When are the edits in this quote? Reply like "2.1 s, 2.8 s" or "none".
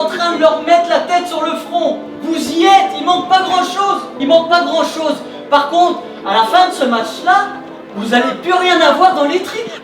2.1 s, 4.1 s